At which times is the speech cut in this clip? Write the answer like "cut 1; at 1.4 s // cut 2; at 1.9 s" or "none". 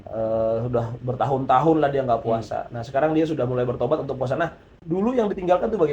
cut 1; at 4.7 s